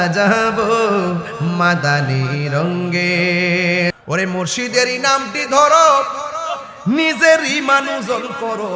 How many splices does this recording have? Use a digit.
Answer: 1